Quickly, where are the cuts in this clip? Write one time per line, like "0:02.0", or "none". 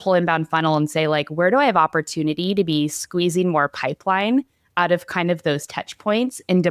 none